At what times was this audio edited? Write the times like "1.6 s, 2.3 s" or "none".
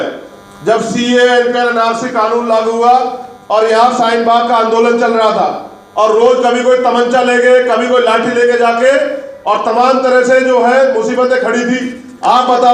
none

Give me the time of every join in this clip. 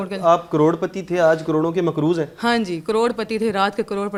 none

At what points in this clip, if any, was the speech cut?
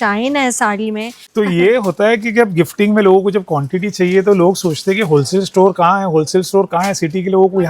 1.2 s

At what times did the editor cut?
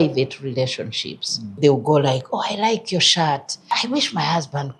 1.6 s, 3.5 s

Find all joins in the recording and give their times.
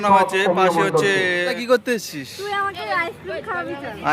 1.6 s

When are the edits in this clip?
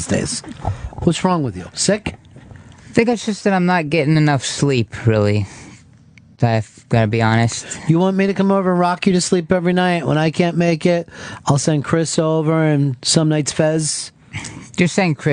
1.6 s

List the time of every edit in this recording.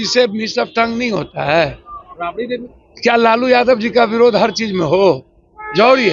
none

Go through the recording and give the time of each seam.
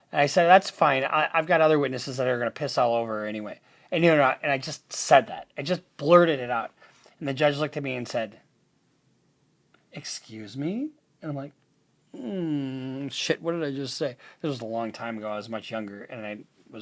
none

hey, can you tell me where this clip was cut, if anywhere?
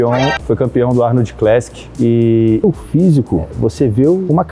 2.6 s

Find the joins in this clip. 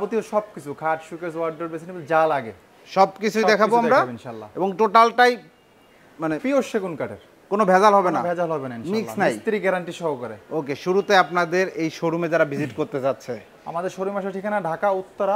none

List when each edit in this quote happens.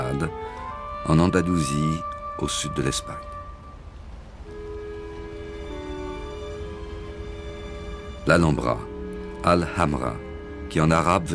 none

